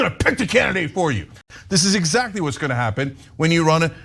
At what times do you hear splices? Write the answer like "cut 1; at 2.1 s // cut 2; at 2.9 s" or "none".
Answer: cut 1; at 1.4 s